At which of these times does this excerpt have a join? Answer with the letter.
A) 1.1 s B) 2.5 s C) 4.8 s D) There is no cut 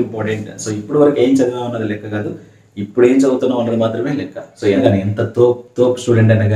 C